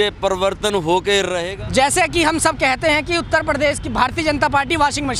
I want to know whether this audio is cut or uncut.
cut